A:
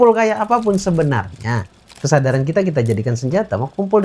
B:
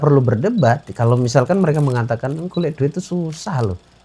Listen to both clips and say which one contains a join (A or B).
A